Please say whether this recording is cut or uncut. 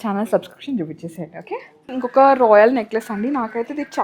cut